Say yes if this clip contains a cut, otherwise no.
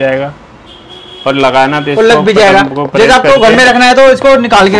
no